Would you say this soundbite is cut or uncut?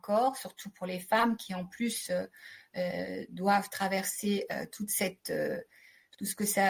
uncut